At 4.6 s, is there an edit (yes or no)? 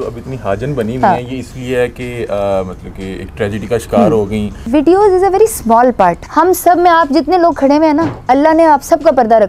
yes